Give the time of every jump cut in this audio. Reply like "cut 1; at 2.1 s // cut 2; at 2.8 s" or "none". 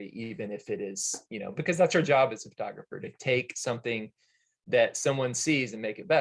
none